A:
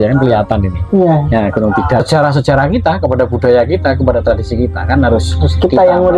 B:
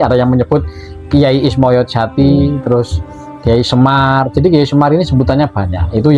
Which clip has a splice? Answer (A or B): A